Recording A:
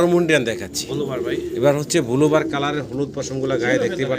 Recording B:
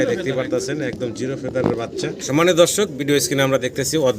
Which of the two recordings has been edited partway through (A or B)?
B